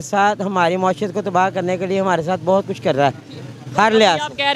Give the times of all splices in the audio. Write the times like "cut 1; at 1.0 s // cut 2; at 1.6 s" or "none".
none